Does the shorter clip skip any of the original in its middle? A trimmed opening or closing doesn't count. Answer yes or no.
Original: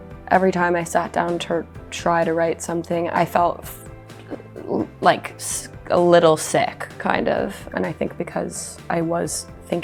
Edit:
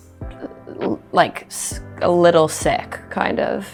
no